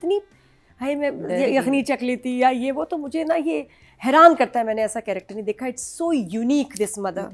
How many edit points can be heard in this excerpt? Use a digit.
0